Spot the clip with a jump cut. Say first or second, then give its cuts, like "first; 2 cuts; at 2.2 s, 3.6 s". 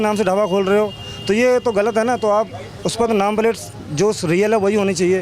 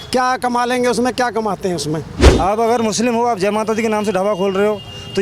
second; 1 cut; at 2.2 s